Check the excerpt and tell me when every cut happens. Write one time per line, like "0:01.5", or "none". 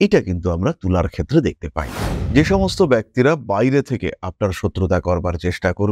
0:02.2